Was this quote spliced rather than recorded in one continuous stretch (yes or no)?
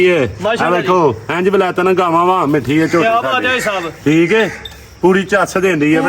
no